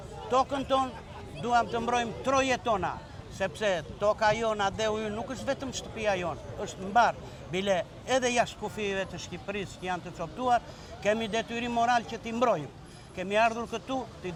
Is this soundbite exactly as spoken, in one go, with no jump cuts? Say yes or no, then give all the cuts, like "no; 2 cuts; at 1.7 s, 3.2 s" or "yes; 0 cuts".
yes; 0 cuts